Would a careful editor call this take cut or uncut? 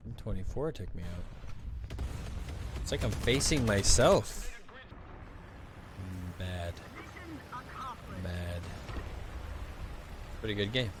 uncut